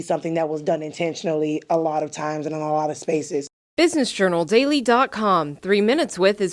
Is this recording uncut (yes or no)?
no